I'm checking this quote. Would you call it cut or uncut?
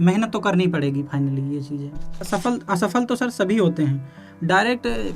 cut